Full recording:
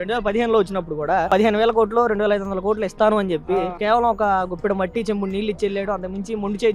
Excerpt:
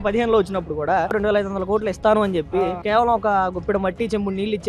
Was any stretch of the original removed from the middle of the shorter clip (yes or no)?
yes